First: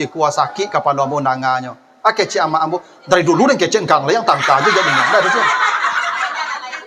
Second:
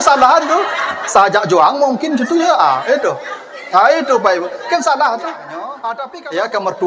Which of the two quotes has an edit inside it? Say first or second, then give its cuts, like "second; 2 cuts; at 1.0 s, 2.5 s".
second; 1 cut; at 5.8 s